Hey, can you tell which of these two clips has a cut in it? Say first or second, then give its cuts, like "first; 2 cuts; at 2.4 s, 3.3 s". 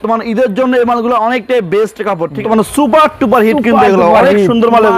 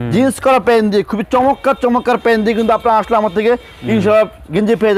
first; 1 cut; at 2.4 s